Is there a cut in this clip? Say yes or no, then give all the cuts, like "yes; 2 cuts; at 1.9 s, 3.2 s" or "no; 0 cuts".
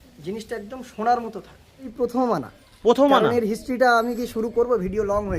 yes; 1 cut; at 1.9 s